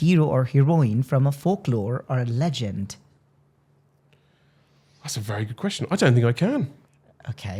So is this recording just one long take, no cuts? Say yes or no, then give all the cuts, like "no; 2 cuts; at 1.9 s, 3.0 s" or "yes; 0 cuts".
yes; 0 cuts